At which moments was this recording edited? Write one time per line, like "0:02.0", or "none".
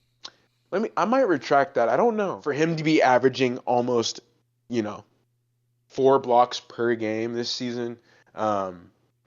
0:02.4